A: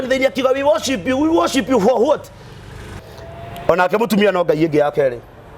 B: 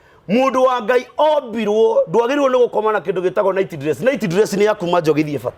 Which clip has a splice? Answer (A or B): A